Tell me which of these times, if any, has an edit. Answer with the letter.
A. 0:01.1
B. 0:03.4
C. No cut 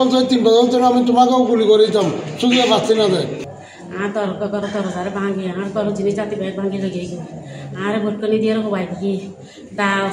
B